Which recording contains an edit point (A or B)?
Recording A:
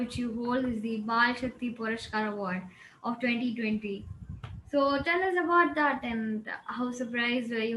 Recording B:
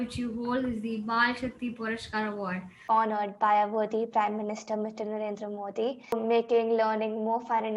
B